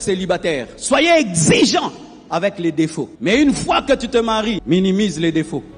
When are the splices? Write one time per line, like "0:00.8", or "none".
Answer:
0:03.1
0:04.6